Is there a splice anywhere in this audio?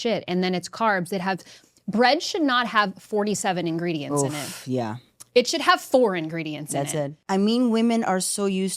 yes; 1 cut; at 7.2 s

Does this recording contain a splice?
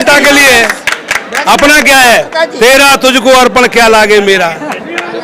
no; 0 cuts

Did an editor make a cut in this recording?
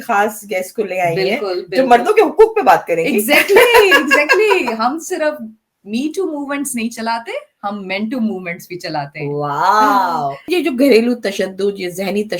yes; 1 cut; at 10.4 s

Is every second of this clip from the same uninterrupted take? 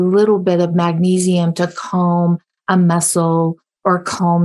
yes; 0 cuts

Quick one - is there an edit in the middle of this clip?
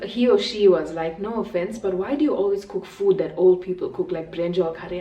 no; 0 cuts

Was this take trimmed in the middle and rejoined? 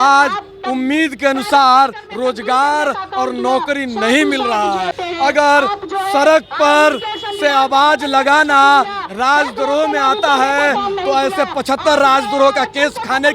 yes; 1 cut; at 4.9 s

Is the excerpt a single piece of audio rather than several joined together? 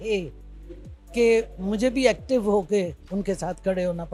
yes; 0 cuts

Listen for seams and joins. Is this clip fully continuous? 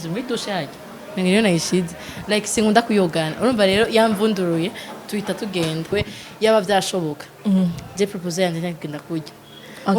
no; 1 cut; at 5.9 s

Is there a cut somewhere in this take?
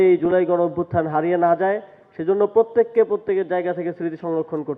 no; 0 cuts

